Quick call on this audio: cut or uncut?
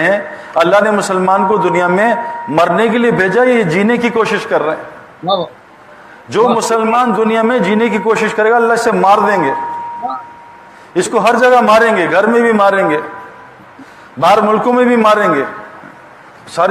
uncut